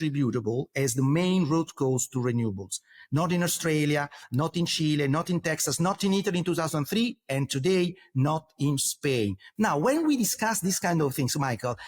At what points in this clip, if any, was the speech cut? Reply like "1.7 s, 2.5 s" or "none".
9.4 s